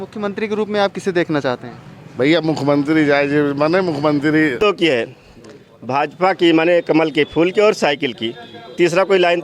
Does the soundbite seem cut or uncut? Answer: cut